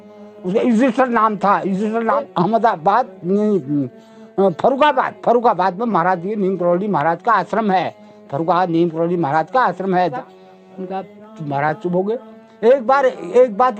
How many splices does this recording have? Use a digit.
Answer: 2